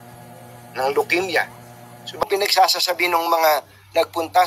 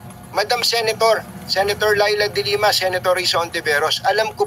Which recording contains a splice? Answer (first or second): first